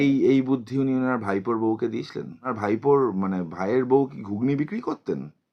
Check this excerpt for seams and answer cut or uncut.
cut